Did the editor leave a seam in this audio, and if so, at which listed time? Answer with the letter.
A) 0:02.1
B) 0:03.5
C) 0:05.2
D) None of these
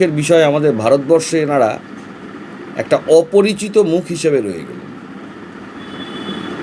D